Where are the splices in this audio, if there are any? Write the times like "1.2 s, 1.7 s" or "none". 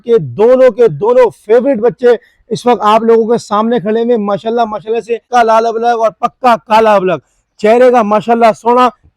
5.2 s